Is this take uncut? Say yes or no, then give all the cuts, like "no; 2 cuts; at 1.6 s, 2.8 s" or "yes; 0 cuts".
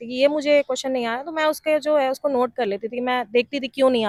yes; 0 cuts